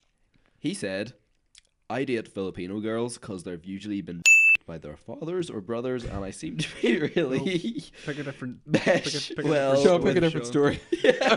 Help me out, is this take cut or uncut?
uncut